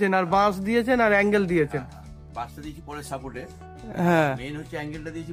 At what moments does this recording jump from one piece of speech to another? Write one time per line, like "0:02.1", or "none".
none

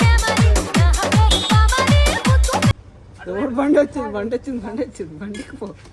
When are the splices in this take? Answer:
0:02.8

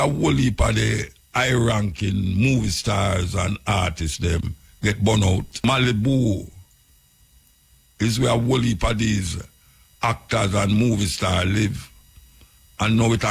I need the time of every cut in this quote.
0:05.6

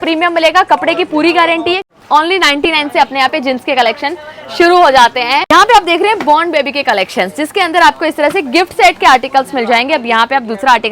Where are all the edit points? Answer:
0:01.8
0:05.5

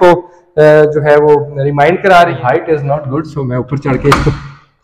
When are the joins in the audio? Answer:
0:02.4

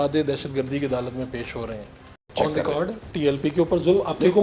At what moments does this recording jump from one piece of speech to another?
0:02.3

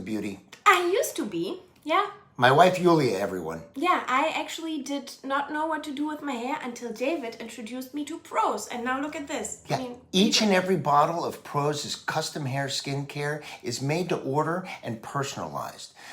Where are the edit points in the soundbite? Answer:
none

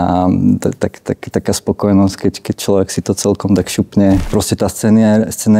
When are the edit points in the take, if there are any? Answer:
0:04.3

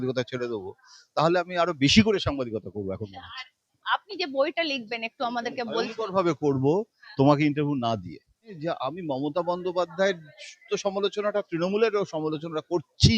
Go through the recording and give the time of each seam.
0:08.5

